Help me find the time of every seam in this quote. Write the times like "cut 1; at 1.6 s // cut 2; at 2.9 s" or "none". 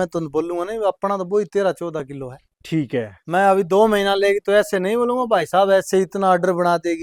none